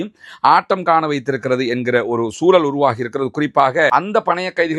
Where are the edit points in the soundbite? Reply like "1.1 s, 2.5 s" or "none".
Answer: 3.9 s